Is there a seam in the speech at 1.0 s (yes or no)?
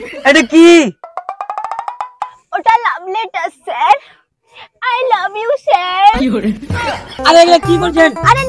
no